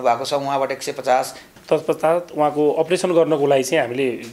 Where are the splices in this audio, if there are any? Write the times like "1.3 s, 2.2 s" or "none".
1.4 s

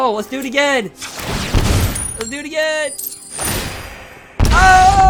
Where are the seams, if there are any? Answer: none

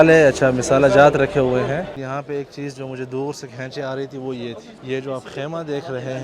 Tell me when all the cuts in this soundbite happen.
1.9 s, 4.7 s

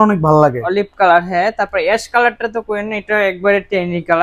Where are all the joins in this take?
none

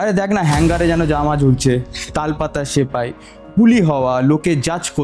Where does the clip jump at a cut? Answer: none

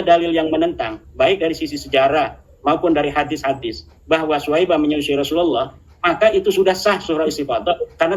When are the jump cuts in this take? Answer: none

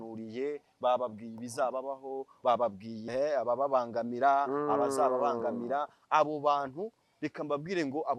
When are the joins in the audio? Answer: 3.0 s

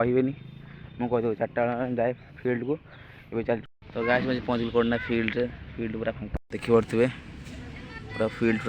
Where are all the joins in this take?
3.6 s

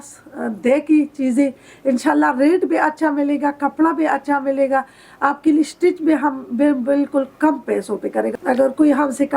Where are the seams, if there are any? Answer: 8.3 s

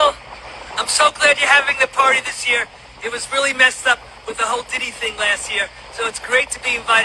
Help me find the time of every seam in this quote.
none

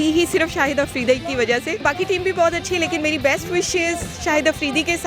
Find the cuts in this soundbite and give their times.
1.8 s

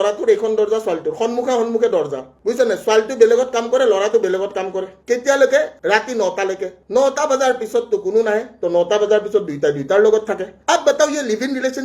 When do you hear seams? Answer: 4.9 s

